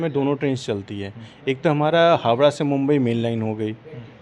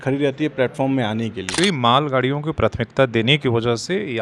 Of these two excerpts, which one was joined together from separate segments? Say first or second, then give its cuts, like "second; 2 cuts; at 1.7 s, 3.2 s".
second; 1 cut; at 1.5 s